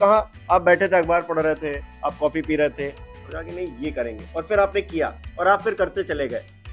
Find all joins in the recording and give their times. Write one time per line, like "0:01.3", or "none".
none